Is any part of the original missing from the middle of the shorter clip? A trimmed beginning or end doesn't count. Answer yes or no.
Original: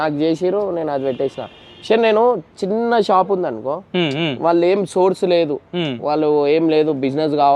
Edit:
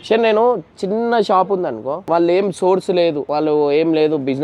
yes